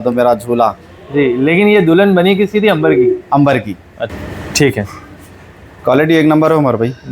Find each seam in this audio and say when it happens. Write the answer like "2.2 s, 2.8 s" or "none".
4.0 s